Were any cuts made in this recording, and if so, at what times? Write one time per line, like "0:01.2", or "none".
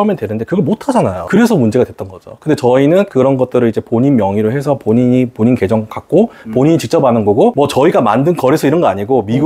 none

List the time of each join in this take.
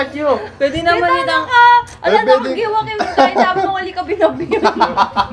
none

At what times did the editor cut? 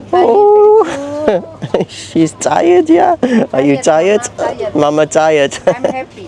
none

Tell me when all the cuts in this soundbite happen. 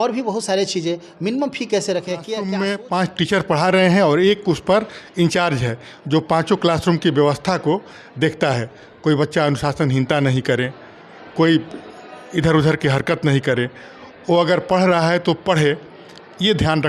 0:02.5

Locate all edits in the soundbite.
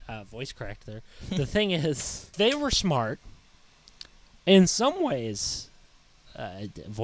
0:02.3

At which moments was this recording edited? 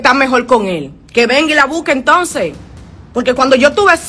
0:01.0

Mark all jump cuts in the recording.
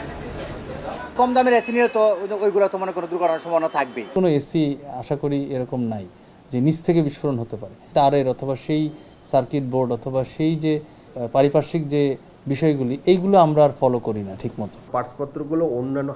0:01.0
0:04.1
0:07.9
0:11.0
0:14.9

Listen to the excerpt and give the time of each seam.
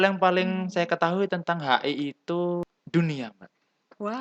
0:02.6

